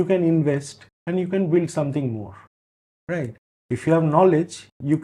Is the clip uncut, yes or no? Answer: yes